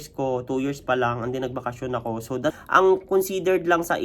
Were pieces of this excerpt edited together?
yes; 1 cut; at 2.5 s

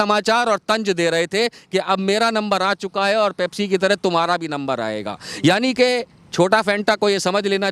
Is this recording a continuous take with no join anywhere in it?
yes; 0 cuts

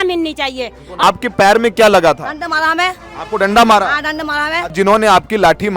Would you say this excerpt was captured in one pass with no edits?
no; 2 cuts; at 1.0 s, 4.6 s

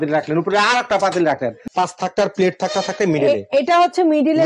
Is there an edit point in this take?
yes; 1 cut; at 1.6 s

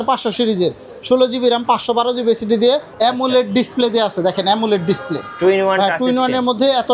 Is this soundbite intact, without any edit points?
no; 1 cut; at 2.9 s

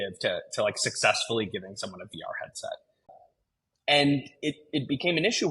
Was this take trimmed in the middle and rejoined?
yes; 1 cut; at 3.2 s

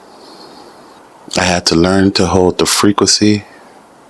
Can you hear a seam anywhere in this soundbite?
yes; 1 cut; at 0.9 s

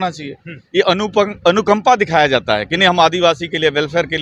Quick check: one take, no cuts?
yes; 0 cuts

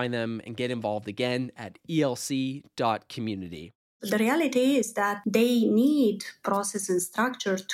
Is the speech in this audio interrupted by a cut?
yes; 1 cut; at 3.9 s

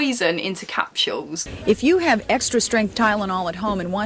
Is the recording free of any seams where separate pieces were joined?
no; 1 cut; at 1.4 s

